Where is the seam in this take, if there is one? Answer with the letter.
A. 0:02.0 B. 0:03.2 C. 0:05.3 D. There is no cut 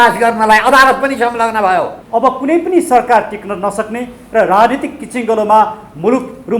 A